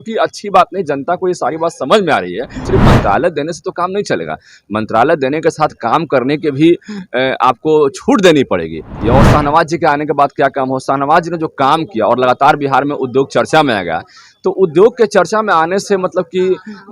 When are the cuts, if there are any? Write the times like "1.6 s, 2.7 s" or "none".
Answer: 2.6 s, 8.9 s